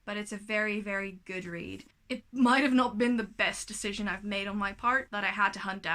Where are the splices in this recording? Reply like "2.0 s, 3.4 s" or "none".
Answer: 1.9 s, 5.1 s